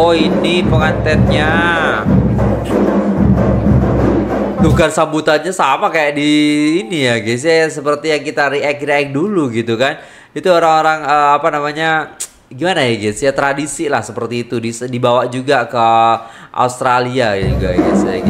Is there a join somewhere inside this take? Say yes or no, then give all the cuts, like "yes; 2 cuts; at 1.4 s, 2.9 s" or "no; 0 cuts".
no; 0 cuts